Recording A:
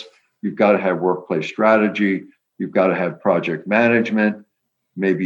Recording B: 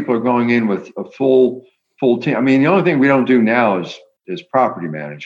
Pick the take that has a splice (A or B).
B